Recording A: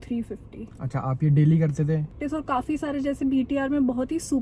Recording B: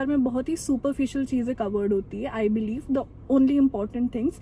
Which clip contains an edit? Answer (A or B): A